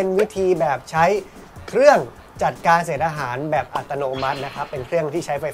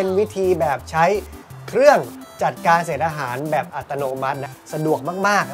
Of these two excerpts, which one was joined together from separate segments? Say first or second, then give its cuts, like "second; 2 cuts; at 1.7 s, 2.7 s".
second; 1 cut; at 4.6 s